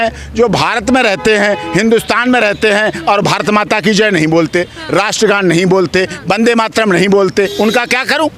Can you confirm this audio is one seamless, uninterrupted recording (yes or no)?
yes